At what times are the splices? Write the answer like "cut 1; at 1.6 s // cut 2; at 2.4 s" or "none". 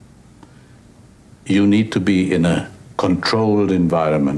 none